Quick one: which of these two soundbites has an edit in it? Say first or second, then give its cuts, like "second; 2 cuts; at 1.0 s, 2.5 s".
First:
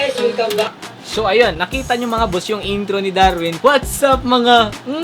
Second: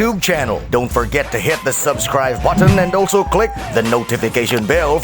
first; 2 cuts; at 1.6 s, 3.6 s